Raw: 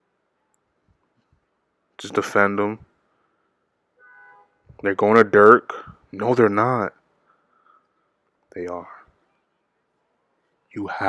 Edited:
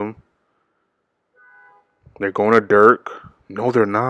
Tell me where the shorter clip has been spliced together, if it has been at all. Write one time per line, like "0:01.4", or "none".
none